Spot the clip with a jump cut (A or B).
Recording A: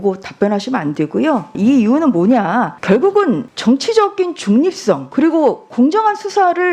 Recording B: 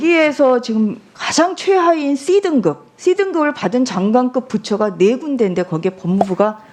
A